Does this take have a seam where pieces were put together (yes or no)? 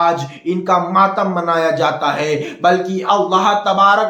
no